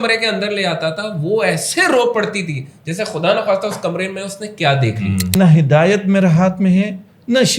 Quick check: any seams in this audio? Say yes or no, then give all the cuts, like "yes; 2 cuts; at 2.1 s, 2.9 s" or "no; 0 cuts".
yes; 1 cut; at 5.3 s